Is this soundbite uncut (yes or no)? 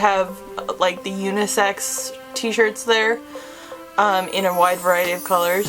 yes